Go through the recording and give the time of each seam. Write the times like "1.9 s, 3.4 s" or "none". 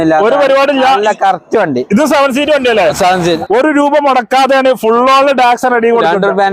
3.4 s